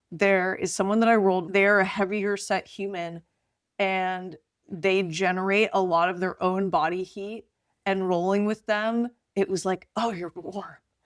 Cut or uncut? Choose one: cut